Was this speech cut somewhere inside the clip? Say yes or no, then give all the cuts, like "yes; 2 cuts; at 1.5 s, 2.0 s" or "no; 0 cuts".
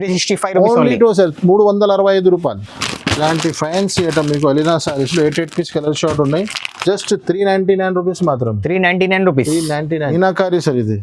yes; 2 cuts; at 2.7 s, 10.1 s